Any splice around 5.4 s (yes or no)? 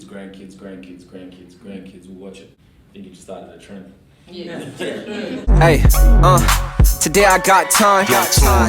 yes